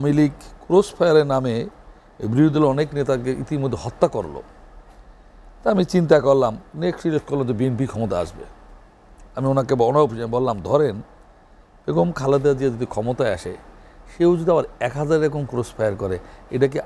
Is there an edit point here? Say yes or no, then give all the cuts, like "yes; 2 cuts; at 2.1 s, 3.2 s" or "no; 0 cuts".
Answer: no; 0 cuts